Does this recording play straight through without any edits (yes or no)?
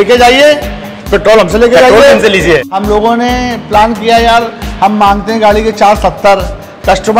no